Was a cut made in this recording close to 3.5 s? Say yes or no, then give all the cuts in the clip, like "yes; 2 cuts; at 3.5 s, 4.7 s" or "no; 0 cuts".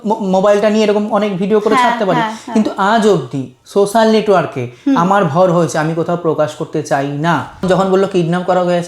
no; 1 cut; at 7.6 s